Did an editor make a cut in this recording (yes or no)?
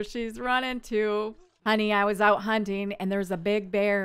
yes